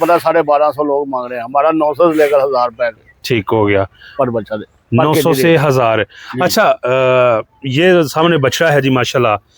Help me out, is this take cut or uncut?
uncut